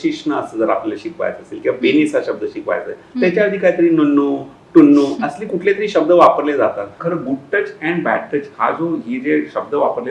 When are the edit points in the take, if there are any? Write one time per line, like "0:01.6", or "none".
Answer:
0:07.0